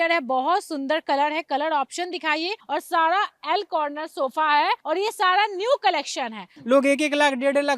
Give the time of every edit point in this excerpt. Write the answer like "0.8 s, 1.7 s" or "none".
2.6 s, 4.8 s, 6.5 s